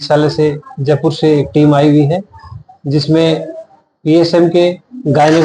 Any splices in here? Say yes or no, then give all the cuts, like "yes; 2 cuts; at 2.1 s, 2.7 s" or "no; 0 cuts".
no; 0 cuts